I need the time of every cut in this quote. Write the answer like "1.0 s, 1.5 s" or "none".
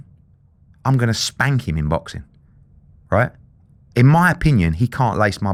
none

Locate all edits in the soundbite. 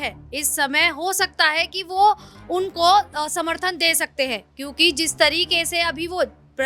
none

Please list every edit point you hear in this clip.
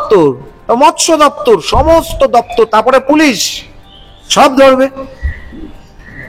none

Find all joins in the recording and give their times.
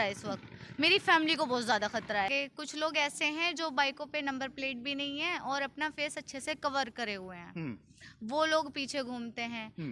2.3 s

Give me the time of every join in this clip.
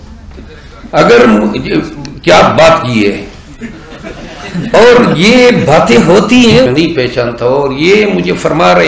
6.7 s

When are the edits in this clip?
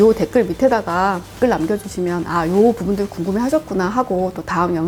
none

